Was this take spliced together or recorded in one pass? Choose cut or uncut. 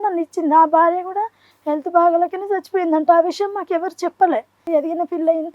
cut